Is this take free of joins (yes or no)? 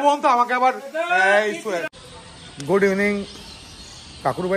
no